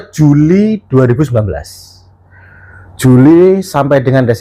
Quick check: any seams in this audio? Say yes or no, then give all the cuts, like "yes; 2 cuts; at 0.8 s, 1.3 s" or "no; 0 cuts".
no; 0 cuts